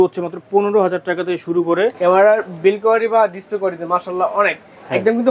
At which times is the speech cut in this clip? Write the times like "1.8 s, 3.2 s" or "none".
2.0 s